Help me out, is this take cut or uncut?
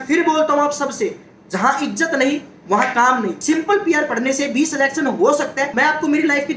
cut